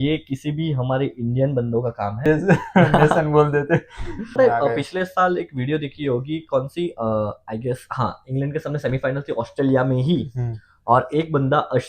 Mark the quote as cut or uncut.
cut